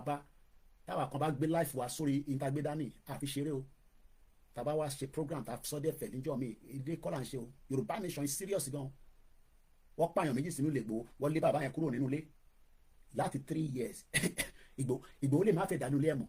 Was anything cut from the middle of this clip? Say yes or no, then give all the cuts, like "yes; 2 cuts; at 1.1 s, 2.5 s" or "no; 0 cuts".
no; 0 cuts